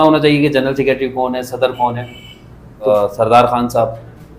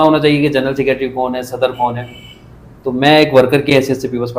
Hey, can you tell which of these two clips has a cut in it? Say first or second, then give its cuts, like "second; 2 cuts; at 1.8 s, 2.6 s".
first; 1 cut; at 2.9 s